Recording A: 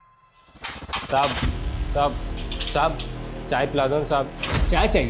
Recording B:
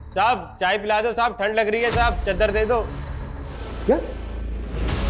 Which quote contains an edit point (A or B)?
B